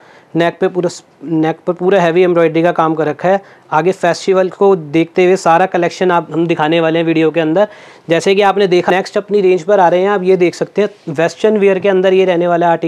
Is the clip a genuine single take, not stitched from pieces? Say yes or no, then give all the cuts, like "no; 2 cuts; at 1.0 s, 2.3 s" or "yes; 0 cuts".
no; 1 cut; at 8.9 s